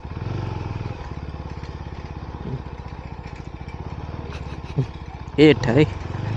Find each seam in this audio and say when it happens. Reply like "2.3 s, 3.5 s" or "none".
none